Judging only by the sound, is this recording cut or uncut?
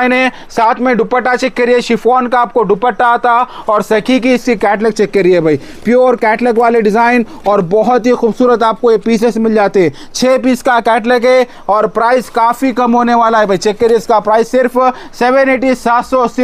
uncut